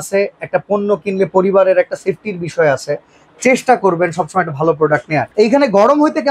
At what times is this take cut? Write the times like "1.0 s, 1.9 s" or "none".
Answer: 5.3 s